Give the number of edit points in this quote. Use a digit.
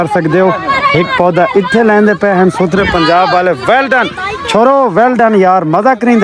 0